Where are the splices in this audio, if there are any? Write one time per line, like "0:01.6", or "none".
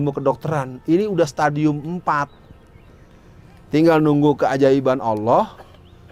none